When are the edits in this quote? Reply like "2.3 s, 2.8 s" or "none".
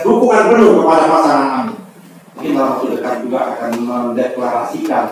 2.4 s